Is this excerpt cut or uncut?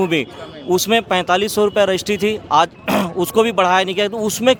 uncut